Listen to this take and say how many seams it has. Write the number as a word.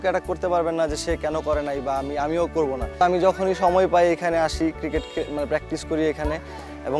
one